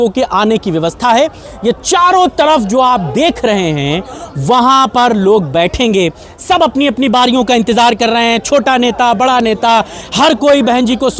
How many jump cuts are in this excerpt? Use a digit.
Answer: 0